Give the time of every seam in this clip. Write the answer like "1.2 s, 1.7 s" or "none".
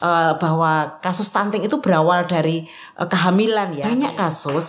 3.8 s